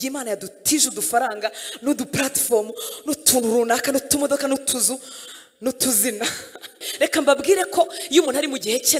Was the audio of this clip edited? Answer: yes; 1 cut; at 6.8 s

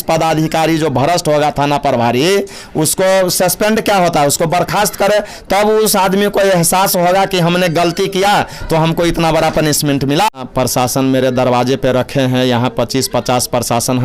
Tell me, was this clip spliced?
yes; 1 cut; at 10.4 s

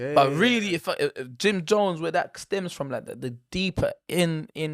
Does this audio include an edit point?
no; 0 cuts

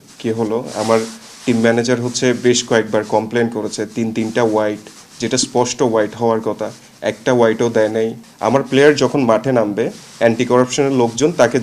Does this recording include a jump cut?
yes; 1 cut; at 8.2 s

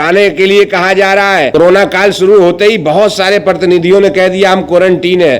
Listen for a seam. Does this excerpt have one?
yes; 1 cut; at 1.5 s

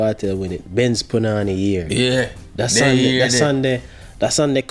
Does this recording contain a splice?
no; 0 cuts

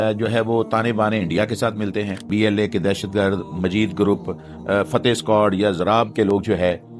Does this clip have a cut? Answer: yes; 1 cut; at 2.3 s

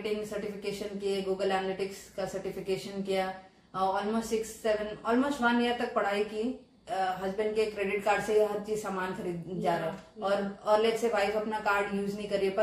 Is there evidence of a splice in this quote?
yes; 1 cut; at 6.8 s

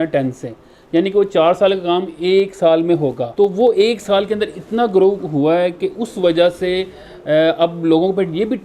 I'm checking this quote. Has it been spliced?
yes; 1 cut; at 3.2 s

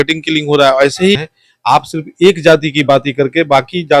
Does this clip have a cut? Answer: yes; 1 cut; at 1.2 s

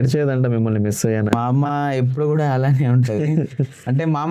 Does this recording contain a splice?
yes; 1 cut; at 1.3 s

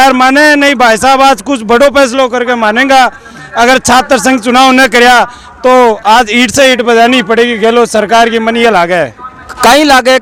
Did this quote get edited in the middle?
no; 0 cuts

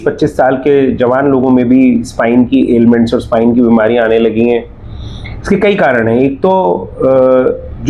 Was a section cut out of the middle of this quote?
no; 0 cuts

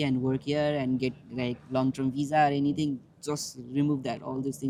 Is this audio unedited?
yes; 0 cuts

